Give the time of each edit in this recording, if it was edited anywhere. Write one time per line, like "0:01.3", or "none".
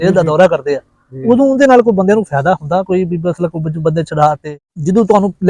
0:04.4